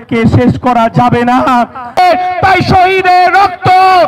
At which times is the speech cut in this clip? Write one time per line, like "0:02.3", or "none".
0:02.0

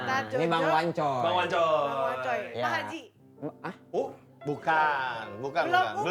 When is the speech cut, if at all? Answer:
none

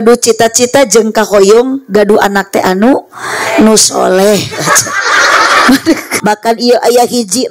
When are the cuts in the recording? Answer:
0:06.1

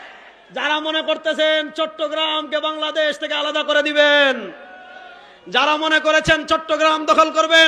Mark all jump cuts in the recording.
none

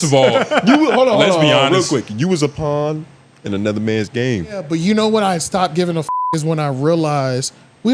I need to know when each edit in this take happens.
0:04.7

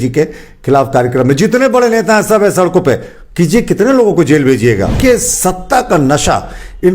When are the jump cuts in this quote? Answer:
0:05.0

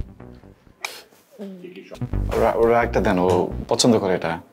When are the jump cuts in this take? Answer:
0:01.9

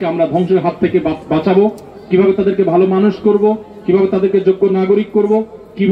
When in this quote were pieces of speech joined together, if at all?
none

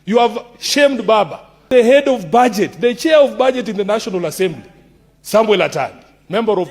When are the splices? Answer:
0:01.6

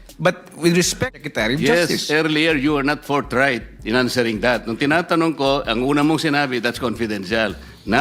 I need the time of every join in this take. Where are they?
0:01.2

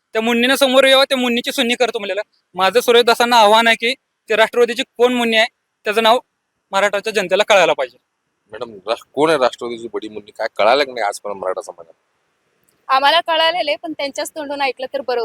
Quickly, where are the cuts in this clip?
none

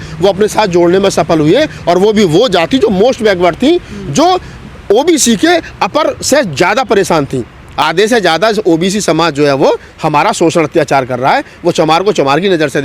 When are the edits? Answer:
0:07.8

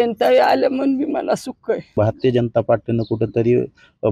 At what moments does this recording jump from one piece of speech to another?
0:02.0

